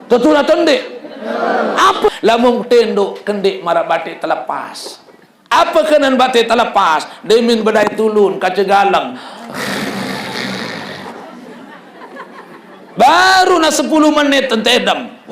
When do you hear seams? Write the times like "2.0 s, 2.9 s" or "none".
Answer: 2.1 s